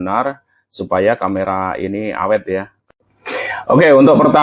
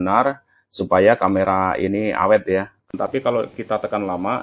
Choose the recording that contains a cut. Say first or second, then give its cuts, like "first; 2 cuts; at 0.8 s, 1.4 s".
second; 1 cut; at 3.0 s